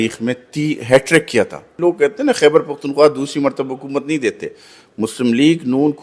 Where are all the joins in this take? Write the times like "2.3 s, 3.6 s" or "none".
1.7 s